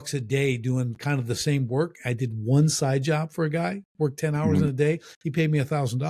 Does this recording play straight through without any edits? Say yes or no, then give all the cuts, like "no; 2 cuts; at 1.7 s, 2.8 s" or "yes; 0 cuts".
yes; 0 cuts